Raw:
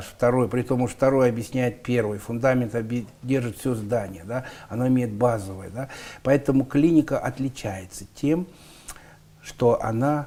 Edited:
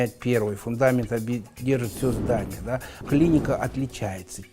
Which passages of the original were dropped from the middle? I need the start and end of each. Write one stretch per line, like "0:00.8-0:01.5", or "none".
0:04.7-0:06.7